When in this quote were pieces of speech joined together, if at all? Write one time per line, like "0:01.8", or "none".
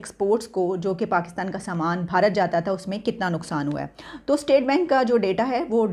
none